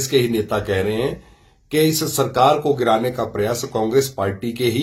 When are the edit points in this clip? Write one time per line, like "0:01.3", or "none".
none